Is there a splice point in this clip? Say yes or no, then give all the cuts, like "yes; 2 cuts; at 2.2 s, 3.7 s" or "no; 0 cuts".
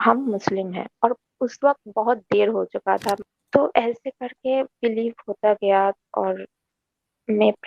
yes; 1 cut; at 3.2 s